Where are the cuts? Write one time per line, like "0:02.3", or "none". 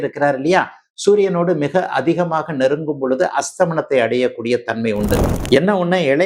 0:05.2

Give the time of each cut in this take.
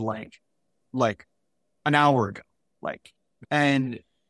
0:03.3

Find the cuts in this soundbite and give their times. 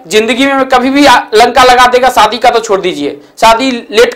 none

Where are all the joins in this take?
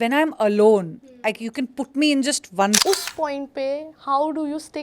0:02.8

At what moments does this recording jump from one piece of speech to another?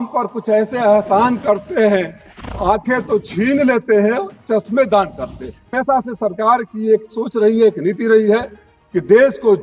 0:05.7

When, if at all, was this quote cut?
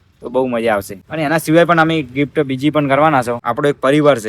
0:01.0
0:03.4

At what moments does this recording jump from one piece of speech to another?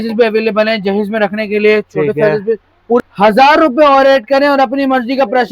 0:03.0

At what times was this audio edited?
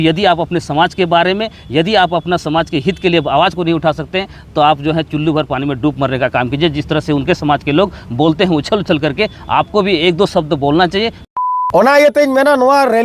0:11.4

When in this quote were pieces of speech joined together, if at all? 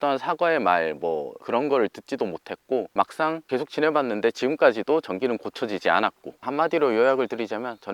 0:01.3
0:03.3
0:06.4

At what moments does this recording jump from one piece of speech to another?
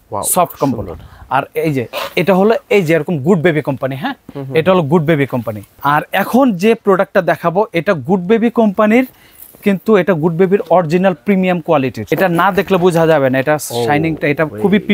0:05.6
0:12.0

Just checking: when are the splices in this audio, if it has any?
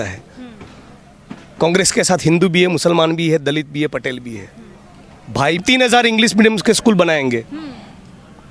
0:05.6

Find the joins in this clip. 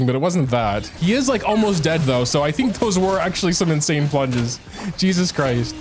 0:00.9

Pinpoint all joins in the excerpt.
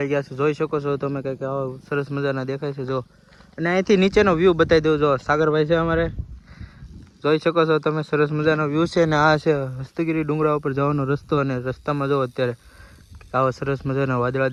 none

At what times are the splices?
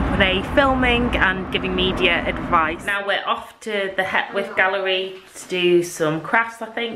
0:02.9

